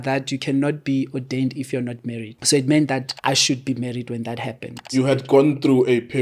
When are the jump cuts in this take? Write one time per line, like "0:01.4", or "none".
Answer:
0:02.3
0:03.1
0:05.0